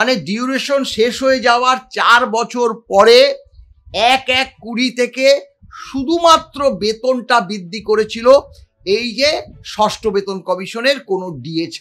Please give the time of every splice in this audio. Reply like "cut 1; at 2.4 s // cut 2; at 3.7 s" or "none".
none